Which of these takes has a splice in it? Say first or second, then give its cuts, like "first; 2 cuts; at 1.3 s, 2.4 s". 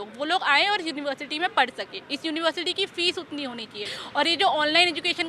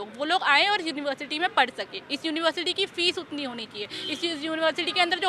first; 1 cut; at 3.9 s